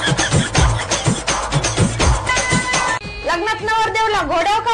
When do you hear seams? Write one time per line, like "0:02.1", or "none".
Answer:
0:03.1